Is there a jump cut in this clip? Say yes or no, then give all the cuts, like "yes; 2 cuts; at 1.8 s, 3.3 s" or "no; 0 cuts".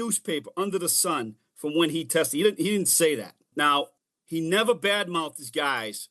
no; 0 cuts